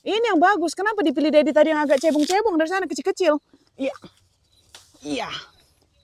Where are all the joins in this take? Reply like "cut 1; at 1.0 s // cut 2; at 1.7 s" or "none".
cut 1; at 3.6 s